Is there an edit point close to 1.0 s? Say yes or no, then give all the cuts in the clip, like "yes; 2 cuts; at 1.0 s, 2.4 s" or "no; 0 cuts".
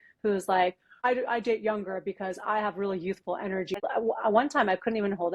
yes; 2 cuts; at 1.0 s, 3.8 s